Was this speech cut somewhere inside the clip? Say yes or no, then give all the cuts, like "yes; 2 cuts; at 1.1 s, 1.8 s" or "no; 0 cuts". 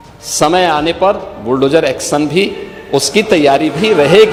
no; 0 cuts